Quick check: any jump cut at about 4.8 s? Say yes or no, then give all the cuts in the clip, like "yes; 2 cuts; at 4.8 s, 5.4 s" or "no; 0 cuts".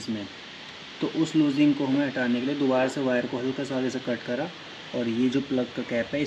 no; 0 cuts